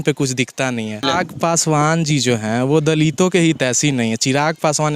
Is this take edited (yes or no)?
yes